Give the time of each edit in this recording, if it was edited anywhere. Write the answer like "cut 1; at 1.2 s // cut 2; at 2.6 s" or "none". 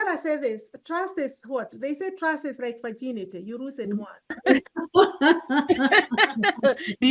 cut 1; at 4.2 s